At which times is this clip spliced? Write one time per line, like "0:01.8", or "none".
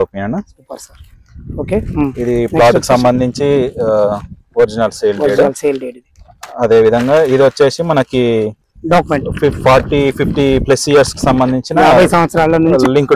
none